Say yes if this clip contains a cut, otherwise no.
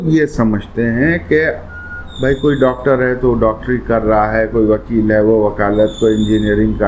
no